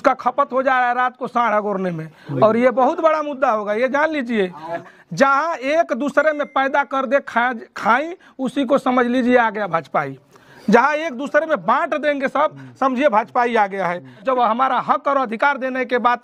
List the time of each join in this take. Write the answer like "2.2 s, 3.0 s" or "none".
4.8 s, 14.2 s